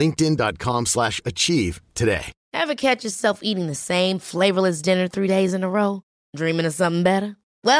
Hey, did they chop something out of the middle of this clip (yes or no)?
yes